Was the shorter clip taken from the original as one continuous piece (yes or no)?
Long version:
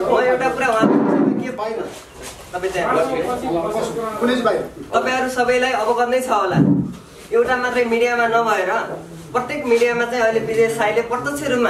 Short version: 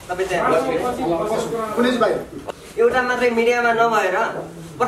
no